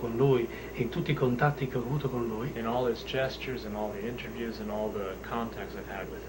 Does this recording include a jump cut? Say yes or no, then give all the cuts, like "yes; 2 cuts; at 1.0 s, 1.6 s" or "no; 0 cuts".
no; 0 cuts